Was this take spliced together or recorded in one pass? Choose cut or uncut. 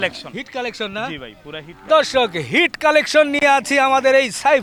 uncut